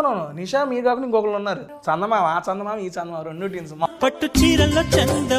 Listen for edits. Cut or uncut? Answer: cut